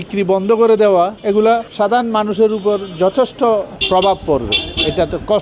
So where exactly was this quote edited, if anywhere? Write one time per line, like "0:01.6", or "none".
0:01.3
0:03.8